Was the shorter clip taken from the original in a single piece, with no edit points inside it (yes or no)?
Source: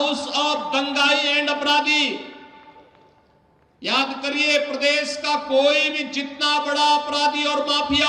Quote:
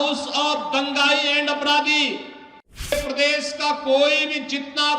no